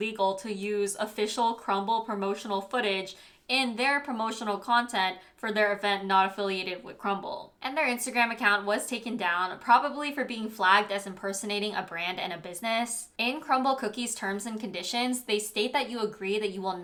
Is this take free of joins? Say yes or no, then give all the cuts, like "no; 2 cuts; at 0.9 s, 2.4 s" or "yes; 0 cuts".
yes; 0 cuts